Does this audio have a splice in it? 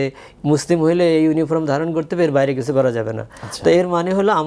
no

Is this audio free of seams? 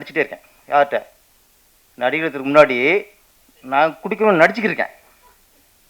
yes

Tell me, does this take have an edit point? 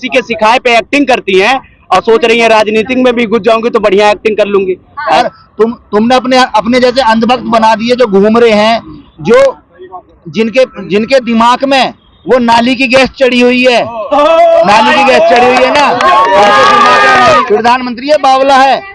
yes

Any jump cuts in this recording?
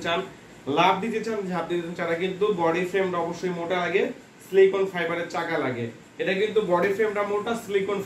no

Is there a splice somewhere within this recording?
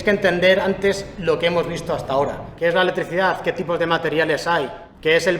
yes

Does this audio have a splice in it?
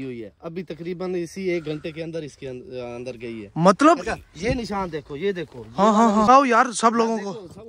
yes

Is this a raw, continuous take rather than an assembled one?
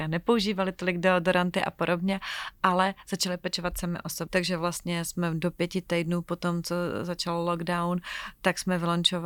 no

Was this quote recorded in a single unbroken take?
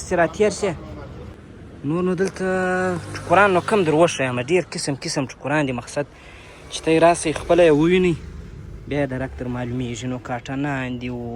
no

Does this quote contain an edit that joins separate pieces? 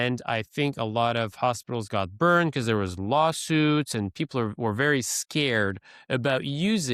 no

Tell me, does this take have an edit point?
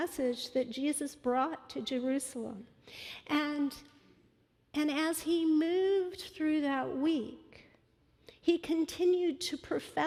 no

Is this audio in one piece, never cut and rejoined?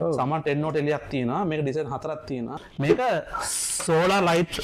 no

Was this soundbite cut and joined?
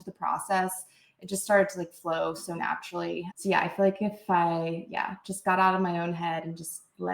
yes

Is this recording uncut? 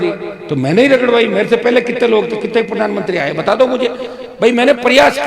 yes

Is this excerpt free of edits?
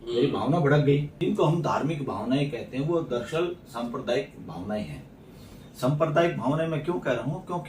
no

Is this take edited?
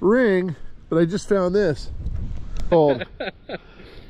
yes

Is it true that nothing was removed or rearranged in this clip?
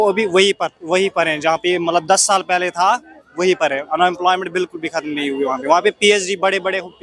yes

